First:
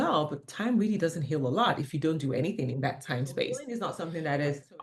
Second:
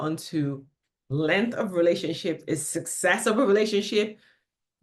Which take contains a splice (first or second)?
first